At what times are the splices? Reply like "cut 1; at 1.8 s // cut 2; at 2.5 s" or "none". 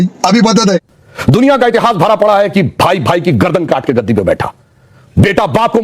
cut 1; at 1.0 s